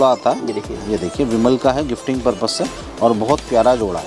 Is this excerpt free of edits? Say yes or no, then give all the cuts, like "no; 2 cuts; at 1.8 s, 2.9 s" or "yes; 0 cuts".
yes; 0 cuts